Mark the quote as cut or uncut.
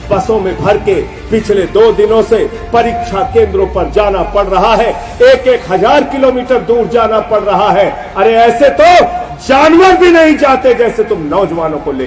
uncut